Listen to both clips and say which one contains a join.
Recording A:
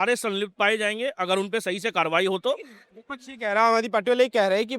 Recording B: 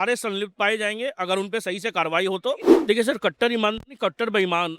B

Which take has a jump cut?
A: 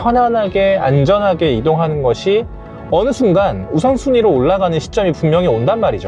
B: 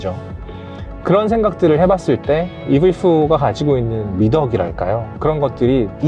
B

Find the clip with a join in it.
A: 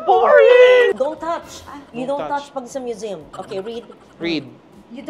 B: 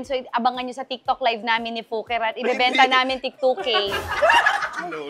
A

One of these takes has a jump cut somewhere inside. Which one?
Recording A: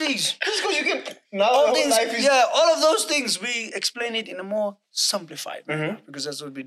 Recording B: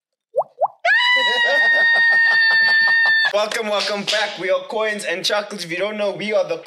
B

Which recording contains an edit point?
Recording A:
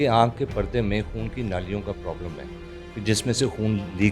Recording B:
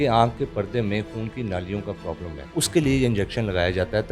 B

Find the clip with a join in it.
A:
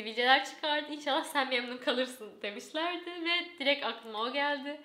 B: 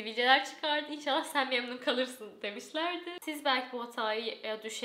B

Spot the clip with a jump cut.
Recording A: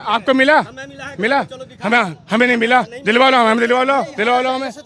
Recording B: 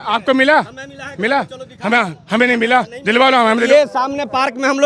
B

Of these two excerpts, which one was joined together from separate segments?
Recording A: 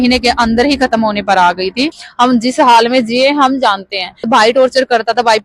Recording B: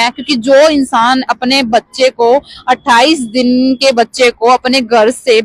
A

